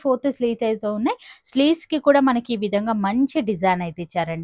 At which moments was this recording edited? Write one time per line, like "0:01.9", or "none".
none